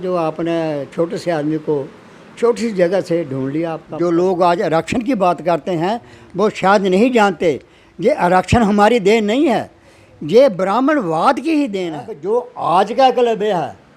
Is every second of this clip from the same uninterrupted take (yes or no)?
no